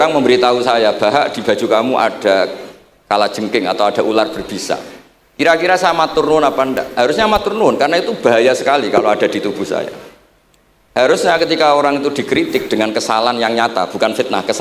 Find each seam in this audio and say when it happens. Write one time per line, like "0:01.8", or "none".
none